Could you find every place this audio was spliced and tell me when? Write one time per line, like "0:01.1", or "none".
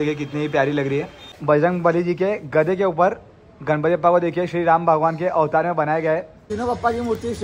0:01.3
0:06.5